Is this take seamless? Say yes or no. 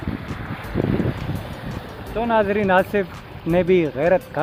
yes